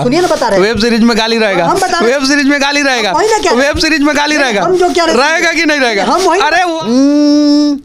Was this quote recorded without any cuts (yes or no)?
no